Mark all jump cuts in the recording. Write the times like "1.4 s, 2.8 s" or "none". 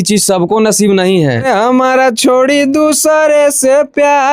1.5 s